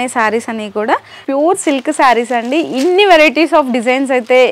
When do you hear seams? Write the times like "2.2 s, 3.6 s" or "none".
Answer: 1.2 s